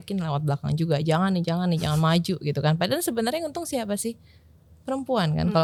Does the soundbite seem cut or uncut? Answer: uncut